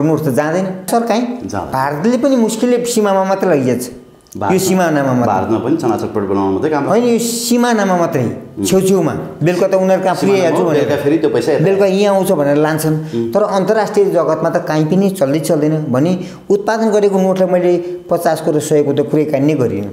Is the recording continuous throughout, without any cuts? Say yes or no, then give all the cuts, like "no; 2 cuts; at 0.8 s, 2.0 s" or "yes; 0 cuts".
yes; 0 cuts